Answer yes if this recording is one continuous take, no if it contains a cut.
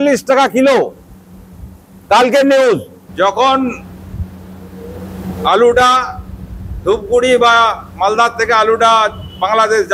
no